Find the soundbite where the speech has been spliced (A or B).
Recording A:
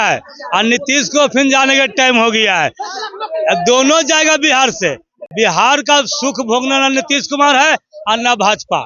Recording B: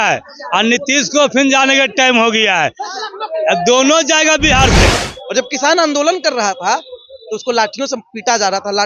B